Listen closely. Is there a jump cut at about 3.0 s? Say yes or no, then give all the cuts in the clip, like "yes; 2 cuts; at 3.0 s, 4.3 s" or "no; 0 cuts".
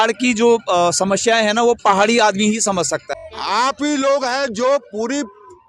yes; 1 cut; at 3.0 s